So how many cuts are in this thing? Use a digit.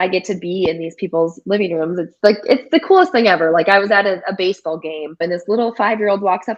1